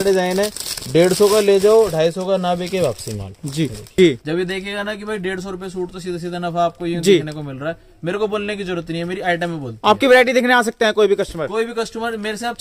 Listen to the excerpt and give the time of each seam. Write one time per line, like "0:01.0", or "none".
0:03.8